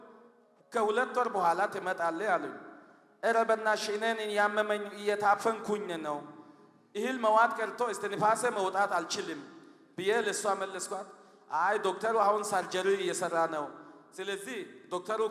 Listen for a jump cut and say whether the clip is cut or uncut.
uncut